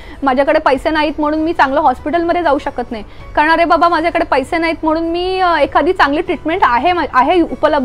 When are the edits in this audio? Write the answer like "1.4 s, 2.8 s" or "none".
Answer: none